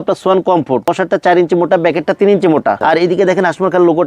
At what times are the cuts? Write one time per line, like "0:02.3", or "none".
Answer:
0:00.9
0:02.8